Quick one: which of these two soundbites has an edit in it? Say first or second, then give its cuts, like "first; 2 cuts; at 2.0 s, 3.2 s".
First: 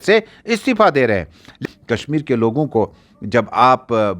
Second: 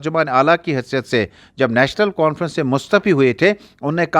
first; 1 cut; at 1.5 s